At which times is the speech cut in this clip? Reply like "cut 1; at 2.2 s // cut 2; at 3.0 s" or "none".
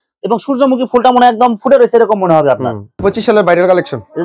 cut 1; at 2.9 s